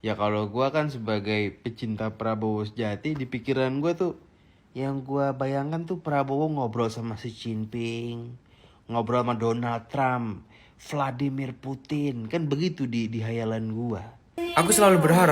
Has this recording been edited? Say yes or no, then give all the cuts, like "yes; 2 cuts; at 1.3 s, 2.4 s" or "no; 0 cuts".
yes; 1 cut; at 14.4 s